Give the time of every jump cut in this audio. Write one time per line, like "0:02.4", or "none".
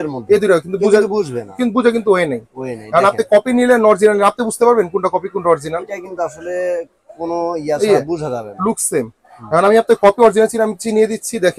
none